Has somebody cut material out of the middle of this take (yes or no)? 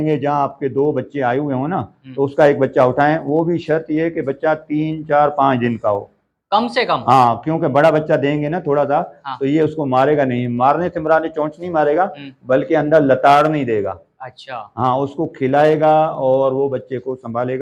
no